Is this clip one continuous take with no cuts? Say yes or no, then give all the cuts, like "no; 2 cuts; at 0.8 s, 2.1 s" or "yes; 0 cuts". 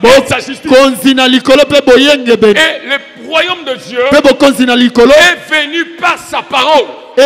yes; 0 cuts